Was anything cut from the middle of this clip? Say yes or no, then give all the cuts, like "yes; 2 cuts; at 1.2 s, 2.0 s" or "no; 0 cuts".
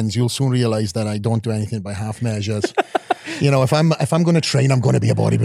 no; 0 cuts